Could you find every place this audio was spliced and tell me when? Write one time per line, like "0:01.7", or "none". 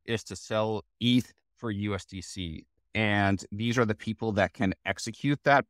0:02.8